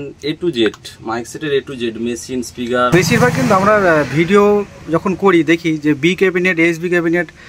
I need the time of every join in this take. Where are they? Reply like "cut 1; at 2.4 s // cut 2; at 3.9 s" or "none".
cut 1; at 2.9 s